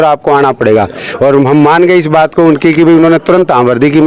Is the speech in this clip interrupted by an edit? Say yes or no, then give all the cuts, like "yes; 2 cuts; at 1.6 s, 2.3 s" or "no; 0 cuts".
no; 0 cuts